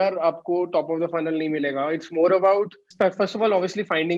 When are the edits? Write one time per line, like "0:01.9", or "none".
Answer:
0:02.9